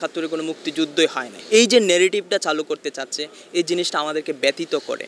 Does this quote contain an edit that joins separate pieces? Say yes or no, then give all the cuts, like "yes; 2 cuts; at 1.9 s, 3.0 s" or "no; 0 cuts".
no; 0 cuts